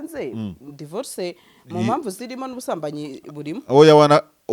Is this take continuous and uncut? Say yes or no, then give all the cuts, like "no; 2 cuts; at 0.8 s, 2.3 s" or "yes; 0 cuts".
yes; 0 cuts